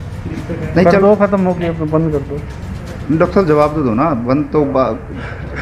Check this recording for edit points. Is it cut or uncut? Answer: uncut